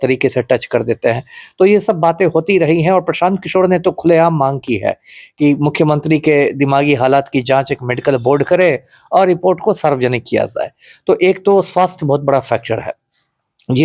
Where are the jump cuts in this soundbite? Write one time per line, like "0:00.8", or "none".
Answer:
none